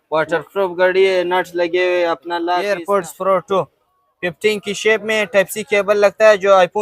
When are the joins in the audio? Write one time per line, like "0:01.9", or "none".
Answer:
0:02.6